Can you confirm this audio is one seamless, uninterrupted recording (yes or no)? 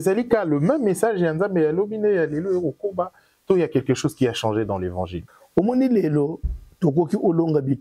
no